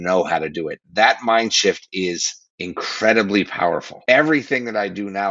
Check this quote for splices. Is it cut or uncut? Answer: cut